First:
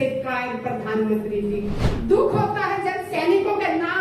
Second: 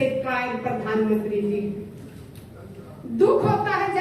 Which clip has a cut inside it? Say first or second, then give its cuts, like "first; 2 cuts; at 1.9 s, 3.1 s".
first; 1 cut; at 1.9 s